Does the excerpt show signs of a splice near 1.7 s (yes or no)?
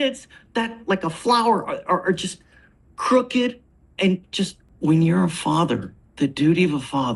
no